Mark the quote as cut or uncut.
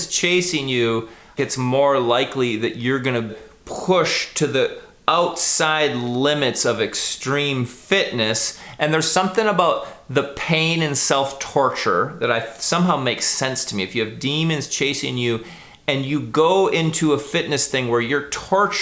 cut